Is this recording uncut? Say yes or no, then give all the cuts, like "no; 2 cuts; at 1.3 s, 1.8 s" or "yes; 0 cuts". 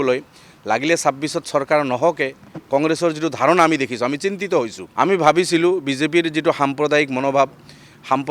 no; 1 cut; at 4.8 s